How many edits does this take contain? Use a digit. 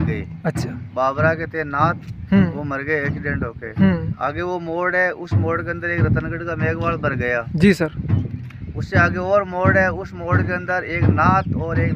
0